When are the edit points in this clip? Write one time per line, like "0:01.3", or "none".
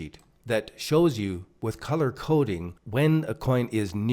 0:02.8